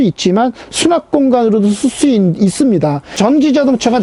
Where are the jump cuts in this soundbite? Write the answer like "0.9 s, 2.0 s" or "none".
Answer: 3.1 s

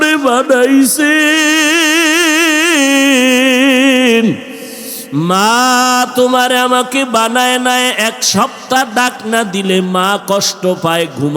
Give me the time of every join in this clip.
none

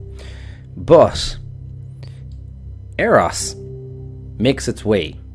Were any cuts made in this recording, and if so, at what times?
none

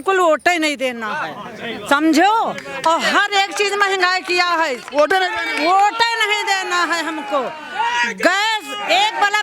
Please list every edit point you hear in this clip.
none

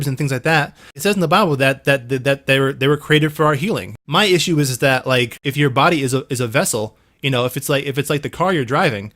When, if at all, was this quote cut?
1.0 s, 3.9 s, 5.4 s

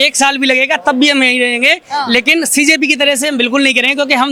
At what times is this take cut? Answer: none

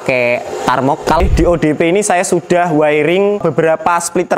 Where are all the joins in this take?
1.2 s

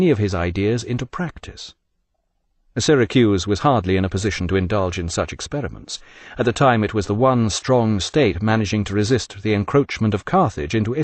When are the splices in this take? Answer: 3.7 s

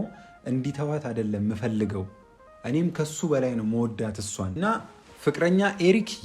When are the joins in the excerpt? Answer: 4.9 s

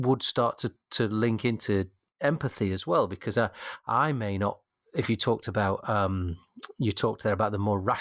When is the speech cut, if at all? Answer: none

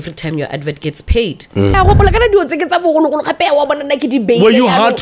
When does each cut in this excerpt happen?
1.8 s

